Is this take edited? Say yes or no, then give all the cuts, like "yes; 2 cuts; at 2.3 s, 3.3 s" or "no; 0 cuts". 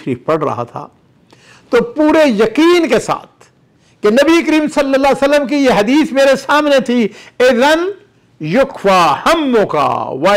no; 0 cuts